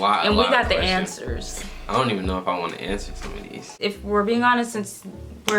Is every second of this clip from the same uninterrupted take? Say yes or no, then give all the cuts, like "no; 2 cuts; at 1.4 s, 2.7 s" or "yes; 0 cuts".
no; 1 cut; at 3.7 s